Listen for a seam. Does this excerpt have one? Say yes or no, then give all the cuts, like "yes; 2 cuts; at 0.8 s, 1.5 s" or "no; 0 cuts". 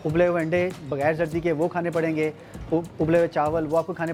no; 0 cuts